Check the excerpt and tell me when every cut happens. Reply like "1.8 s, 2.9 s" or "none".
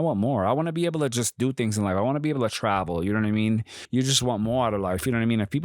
3.7 s